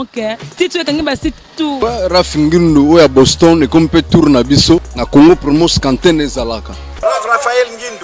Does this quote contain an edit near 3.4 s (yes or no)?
no